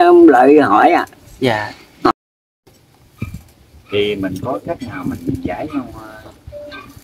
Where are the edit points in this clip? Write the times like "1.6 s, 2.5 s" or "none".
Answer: 2.1 s